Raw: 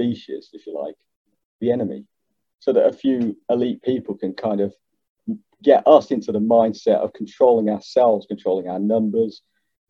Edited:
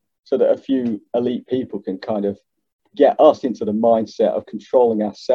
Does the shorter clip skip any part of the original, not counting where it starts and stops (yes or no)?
yes